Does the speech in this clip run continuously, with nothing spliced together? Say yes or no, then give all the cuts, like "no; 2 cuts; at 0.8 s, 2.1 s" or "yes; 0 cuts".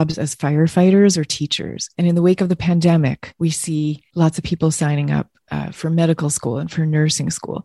no; 2 cuts; at 1.9 s, 3.8 s